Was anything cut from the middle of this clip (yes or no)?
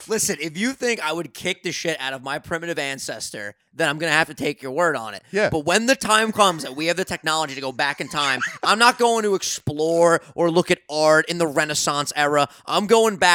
no